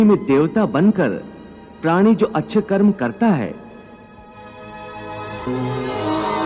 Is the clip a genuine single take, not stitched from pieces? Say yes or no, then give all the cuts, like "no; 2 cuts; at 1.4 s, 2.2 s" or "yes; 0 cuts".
yes; 0 cuts